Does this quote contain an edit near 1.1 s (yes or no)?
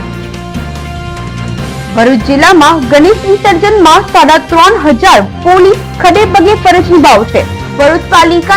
yes